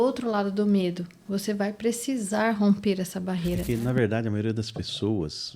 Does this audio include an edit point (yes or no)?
yes